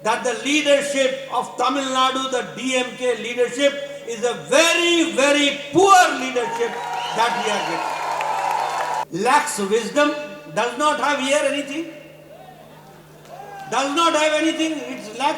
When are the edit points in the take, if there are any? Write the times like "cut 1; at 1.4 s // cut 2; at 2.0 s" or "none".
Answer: cut 1; at 9.1 s